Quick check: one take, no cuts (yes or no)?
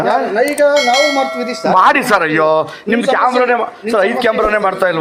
yes